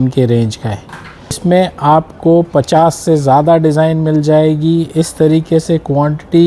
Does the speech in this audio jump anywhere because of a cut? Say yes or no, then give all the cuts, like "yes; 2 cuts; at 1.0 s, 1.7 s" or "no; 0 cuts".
yes; 1 cut; at 1.4 s